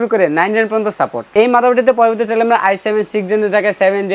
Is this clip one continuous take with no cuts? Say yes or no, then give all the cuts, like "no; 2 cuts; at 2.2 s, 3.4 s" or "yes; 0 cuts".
yes; 0 cuts